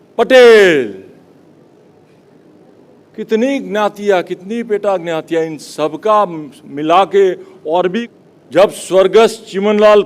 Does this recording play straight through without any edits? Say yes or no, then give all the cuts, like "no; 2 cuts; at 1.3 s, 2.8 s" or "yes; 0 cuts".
no; 1 cut; at 8.0 s